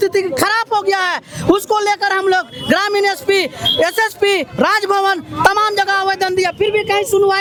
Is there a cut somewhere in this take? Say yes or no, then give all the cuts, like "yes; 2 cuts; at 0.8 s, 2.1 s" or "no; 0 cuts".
no; 0 cuts